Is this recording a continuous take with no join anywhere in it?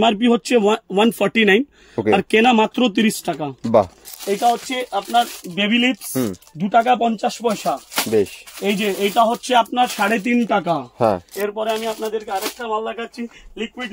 no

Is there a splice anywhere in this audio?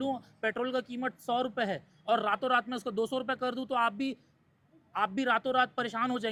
no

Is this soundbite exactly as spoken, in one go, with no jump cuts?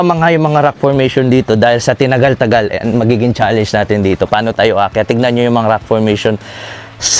yes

